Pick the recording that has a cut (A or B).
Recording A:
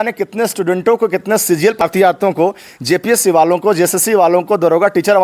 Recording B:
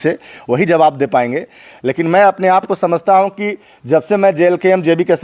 A